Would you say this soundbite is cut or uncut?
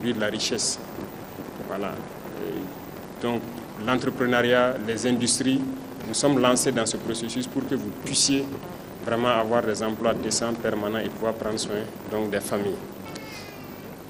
cut